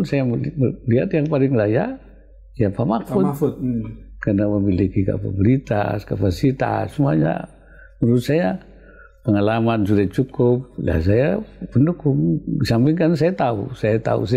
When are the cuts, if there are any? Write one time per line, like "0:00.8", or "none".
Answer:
none